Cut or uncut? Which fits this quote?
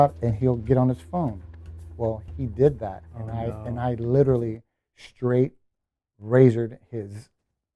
uncut